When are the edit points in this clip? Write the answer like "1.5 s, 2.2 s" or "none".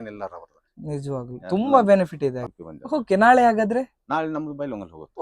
2.4 s